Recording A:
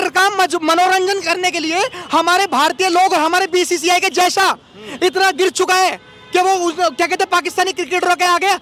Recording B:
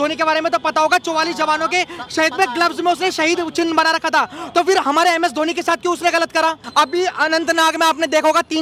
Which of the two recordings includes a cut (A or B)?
B